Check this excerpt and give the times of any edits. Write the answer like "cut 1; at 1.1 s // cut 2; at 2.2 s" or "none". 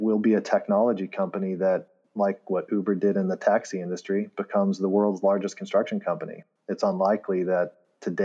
none